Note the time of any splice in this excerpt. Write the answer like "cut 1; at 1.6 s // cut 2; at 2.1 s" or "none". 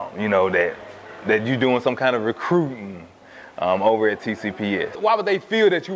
cut 1; at 5.0 s